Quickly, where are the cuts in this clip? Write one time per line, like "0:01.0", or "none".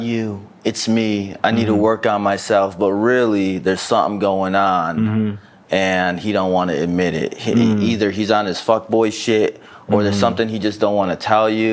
none